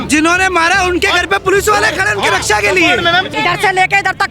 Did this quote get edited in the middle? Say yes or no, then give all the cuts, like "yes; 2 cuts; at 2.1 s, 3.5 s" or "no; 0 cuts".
yes; 1 cut; at 3.3 s